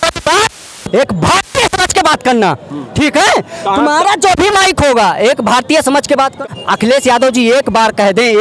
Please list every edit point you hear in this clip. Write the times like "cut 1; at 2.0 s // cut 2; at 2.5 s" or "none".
cut 1; at 6.4 s